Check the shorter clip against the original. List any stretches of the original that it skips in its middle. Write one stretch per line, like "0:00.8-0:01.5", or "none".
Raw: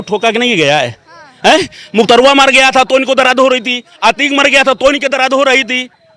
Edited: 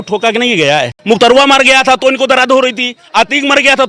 0:00.9-0:01.8